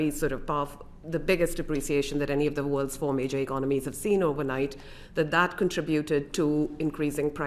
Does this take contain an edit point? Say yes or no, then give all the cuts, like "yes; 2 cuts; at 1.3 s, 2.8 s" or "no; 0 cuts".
no; 0 cuts